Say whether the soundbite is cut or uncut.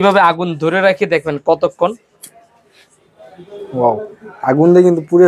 uncut